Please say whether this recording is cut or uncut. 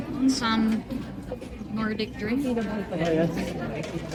uncut